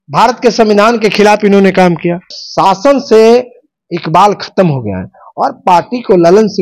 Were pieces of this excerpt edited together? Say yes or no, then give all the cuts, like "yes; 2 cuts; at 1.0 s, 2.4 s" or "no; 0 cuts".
yes; 1 cut; at 2.3 s